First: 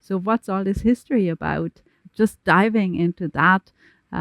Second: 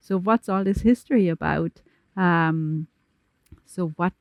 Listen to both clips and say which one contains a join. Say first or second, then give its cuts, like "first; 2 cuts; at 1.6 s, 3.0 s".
first; 1 cut; at 2.0 s